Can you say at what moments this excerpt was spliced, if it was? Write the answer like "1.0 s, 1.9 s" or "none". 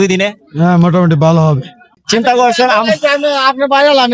1.9 s